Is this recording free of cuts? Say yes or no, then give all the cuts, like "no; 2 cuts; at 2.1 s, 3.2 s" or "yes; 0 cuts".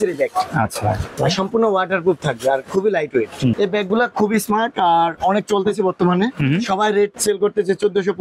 no; 2 cuts; at 1.1 s, 3.5 s